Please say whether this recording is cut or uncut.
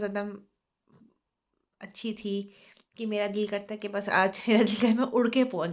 uncut